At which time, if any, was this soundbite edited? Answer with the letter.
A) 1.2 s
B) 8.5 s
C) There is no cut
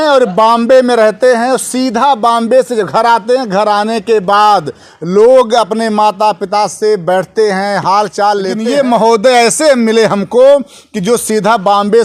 B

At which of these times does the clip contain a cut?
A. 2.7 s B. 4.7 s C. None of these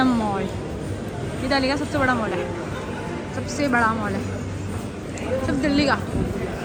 C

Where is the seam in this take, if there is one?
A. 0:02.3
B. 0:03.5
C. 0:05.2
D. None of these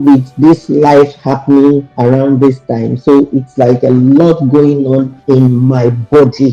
C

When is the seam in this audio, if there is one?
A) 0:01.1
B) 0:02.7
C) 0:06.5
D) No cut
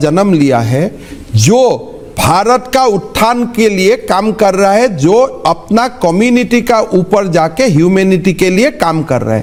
D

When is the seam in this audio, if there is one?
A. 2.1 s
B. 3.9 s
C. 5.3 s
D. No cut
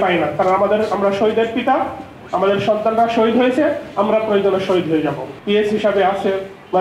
C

